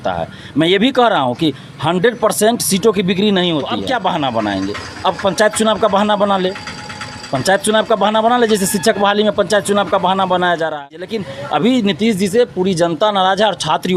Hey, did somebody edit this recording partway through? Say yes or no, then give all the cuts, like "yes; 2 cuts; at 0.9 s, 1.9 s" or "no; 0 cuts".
yes; 2 cuts; at 3.8 s, 11.2 s